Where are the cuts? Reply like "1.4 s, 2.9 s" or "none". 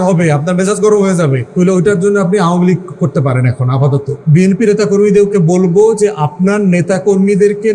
1.4 s, 4.1 s